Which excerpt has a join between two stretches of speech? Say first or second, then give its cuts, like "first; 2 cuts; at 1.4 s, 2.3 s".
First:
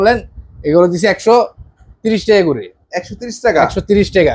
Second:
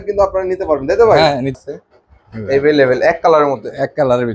second; 1 cut; at 1.5 s